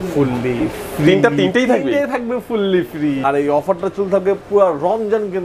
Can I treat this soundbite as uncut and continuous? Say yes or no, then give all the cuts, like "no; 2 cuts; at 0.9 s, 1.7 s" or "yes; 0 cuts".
no; 1 cut; at 3.2 s